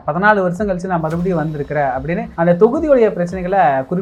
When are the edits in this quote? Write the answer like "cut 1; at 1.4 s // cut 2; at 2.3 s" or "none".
none